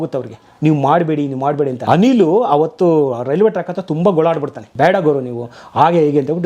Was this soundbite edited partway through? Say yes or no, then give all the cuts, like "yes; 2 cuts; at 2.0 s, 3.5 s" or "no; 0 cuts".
yes; 2 cuts; at 1.8 s, 4.7 s